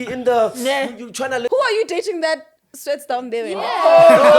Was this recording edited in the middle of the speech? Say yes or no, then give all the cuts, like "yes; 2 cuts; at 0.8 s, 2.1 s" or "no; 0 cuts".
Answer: yes; 2 cuts; at 1.5 s, 3.5 s